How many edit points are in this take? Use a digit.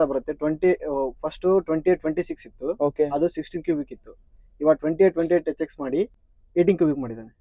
0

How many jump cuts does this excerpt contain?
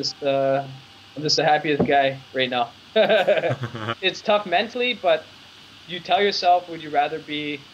1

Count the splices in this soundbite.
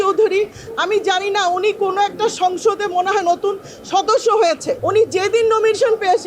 1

